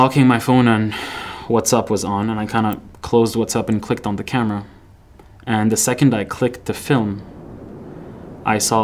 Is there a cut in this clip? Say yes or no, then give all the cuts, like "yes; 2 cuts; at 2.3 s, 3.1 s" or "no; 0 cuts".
no; 0 cuts